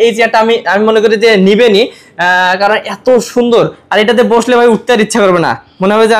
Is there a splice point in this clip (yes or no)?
no